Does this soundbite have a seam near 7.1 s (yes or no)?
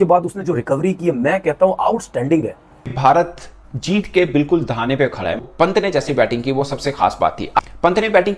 no